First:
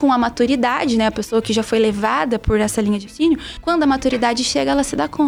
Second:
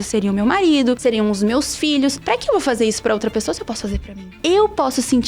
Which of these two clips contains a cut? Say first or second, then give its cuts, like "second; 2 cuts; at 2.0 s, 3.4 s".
second; 3 cuts; at 1.0 s, 2.2 s, 4.2 s